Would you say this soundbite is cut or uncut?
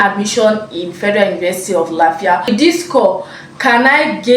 cut